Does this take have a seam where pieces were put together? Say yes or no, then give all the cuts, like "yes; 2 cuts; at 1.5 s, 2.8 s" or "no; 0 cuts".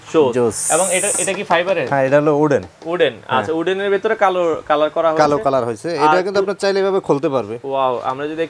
no; 0 cuts